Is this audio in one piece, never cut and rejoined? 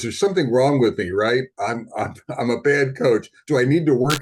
yes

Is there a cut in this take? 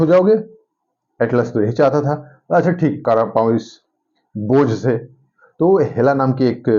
yes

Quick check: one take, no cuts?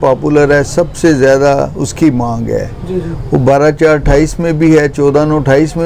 yes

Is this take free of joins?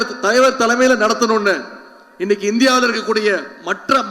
yes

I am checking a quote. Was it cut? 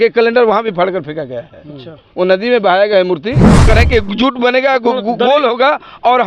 yes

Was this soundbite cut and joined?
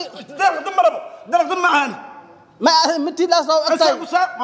no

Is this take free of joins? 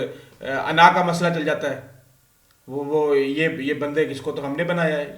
yes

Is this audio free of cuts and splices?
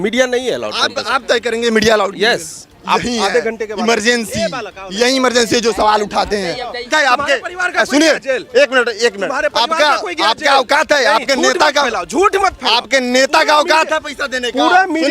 no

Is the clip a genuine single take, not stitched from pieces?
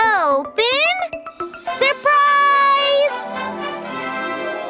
no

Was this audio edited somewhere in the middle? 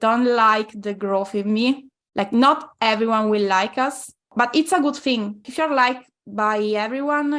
yes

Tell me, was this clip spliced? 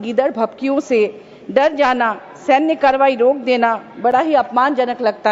no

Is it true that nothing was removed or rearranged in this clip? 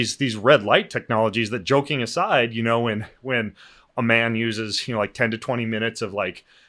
yes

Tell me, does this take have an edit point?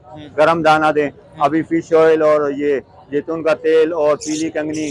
no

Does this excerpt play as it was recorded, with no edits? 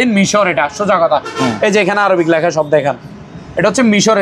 yes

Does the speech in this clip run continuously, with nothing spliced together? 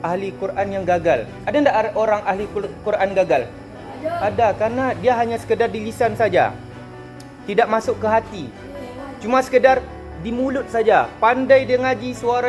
yes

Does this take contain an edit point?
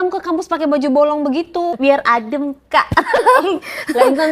yes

